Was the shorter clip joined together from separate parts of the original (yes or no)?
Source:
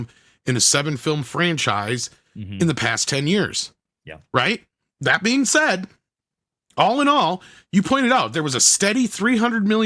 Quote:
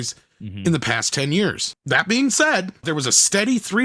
yes